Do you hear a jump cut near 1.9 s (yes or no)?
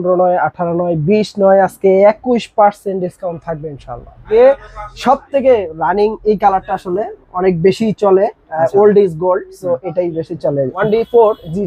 no